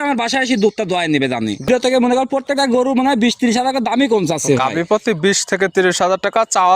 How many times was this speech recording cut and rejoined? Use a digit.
1